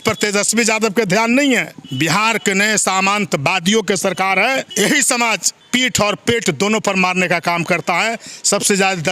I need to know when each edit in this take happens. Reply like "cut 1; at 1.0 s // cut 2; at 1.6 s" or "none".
cut 1; at 1.8 s // cut 2; at 4.7 s // cut 3; at 5.5 s

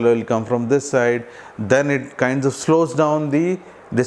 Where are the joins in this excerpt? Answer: none

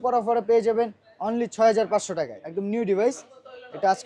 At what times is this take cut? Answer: cut 1; at 2.4 s

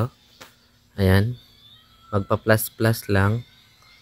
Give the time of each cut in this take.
none

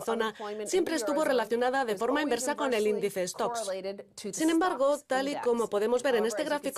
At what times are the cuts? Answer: none

